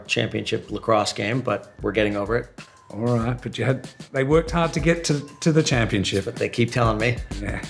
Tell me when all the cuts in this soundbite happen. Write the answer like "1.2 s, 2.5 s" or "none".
none